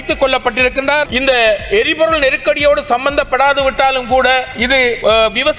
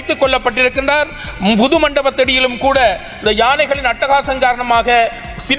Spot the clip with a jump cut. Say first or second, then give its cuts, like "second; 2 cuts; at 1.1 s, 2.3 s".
first; 2 cuts; at 1.1 s, 4.8 s